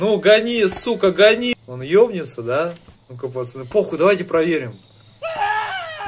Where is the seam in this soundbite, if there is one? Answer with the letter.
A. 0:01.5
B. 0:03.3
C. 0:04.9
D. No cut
A